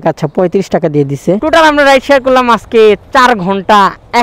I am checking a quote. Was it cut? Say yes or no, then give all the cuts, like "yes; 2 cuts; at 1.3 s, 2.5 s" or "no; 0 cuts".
yes; 1 cut; at 1.4 s